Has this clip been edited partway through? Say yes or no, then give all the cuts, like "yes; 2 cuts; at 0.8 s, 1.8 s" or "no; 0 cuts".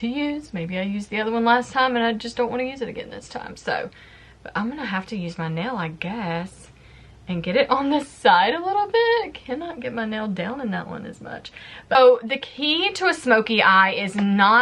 no; 0 cuts